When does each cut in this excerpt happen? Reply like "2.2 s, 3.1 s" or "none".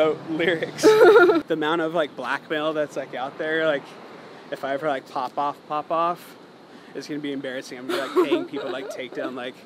1.4 s